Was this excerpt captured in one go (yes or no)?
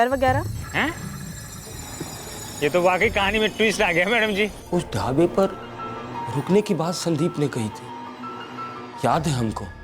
no